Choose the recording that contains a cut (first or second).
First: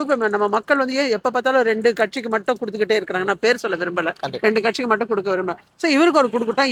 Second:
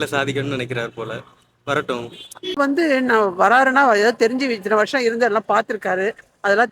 second